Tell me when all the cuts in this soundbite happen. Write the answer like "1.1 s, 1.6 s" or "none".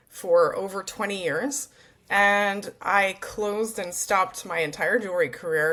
none